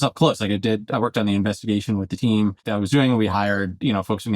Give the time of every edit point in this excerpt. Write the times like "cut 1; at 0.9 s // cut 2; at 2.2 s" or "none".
cut 1; at 2.7 s